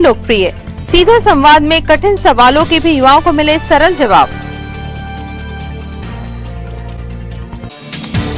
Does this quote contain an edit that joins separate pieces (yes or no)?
no